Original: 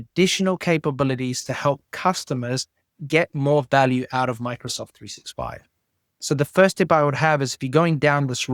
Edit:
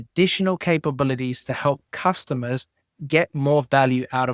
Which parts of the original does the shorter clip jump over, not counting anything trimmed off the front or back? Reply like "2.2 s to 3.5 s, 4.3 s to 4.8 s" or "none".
none